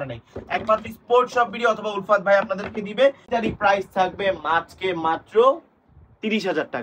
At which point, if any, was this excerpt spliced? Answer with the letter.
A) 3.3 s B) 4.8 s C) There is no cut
A